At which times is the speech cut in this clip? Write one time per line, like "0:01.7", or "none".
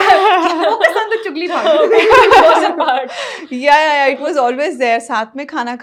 none